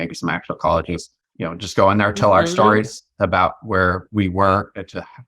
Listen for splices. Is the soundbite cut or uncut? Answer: cut